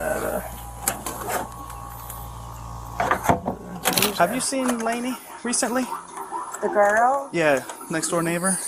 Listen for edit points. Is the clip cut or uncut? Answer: cut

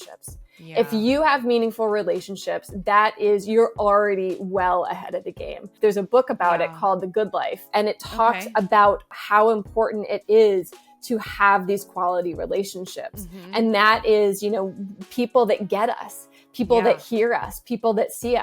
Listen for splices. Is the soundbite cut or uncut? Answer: cut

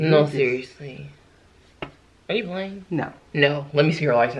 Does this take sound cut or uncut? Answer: cut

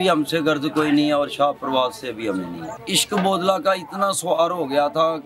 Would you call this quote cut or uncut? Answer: cut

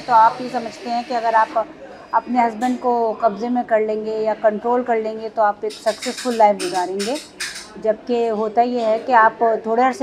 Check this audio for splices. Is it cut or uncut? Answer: uncut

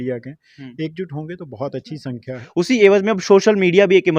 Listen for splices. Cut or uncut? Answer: cut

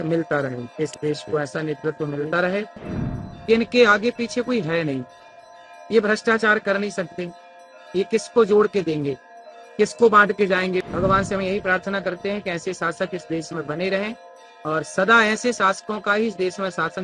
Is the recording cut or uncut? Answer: cut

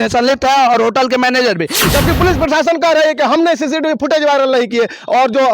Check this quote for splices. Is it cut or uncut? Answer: cut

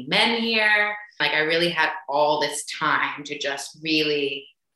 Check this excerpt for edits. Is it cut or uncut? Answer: cut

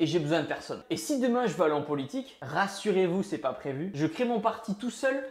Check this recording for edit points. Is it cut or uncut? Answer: uncut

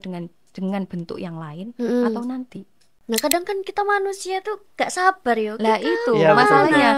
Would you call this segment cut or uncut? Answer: cut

